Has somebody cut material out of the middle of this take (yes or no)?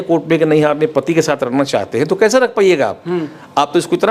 no